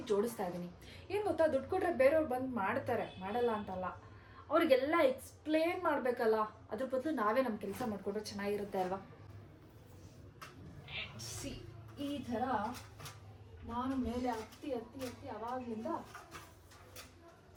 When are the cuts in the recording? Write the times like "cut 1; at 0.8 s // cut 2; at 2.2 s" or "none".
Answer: none